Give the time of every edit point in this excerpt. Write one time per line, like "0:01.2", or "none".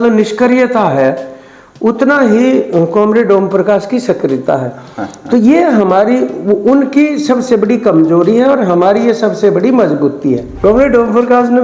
0:10.5